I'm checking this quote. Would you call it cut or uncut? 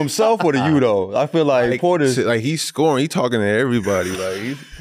uncut